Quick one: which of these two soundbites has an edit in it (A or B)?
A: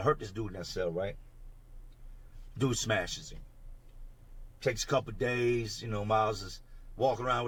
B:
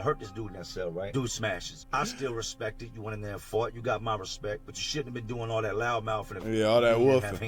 B